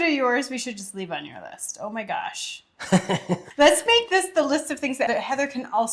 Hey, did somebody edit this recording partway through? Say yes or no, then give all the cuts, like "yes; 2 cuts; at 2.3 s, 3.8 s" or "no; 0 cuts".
yes; 2 cuts; at 3.5 s, 5.1 s